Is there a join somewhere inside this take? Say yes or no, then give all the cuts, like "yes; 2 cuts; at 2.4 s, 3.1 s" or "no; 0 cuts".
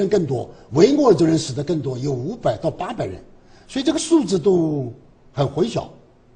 yes; 1 cut; at 3.4 s